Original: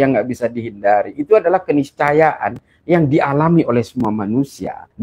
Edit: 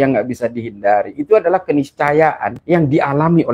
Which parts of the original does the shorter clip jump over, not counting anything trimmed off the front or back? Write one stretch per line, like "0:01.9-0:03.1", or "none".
0:02.5-0:02.7

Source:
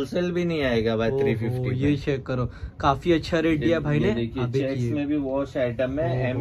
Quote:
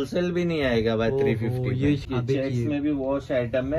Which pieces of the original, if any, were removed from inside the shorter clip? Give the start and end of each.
0:02.0-0:04.3

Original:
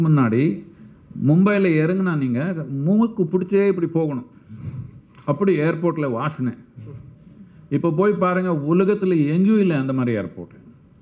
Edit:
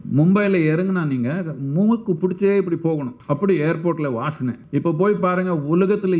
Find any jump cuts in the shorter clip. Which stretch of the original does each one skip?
0:04.2-0:05.1
0:06.6-0:07.6

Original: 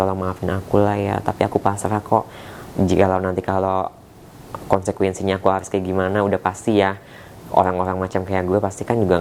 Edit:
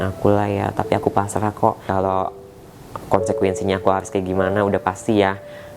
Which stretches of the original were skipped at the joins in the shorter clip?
0:02.3-0:03.4

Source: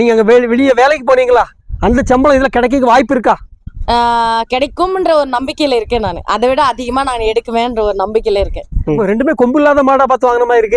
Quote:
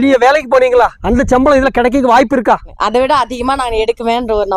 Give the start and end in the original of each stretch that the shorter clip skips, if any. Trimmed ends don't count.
0:01.5-0:01.8
0:03.5-0:06.2

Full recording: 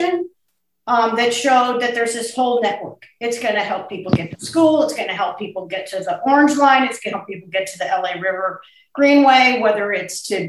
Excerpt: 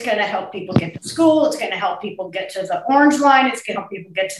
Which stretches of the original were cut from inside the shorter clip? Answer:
none

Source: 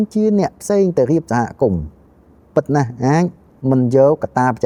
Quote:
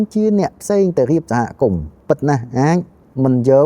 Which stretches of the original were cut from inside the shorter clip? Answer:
0:01.9-0:02.4

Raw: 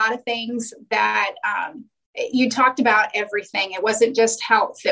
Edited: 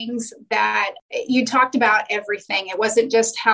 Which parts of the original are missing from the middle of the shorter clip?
0:01.4-0:02.0

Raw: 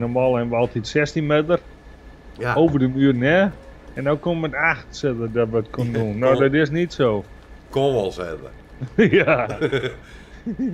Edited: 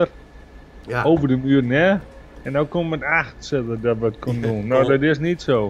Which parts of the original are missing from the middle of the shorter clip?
none

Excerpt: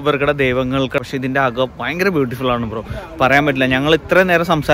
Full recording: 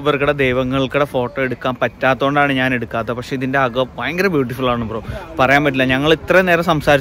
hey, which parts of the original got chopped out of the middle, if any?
0:01.0-0:03.2

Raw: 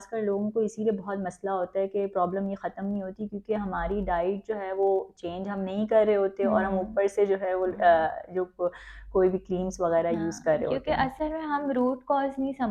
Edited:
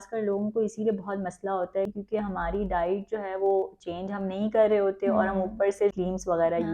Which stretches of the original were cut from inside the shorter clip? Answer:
0:01.9-0:03.3
0:07.3-0:09.4

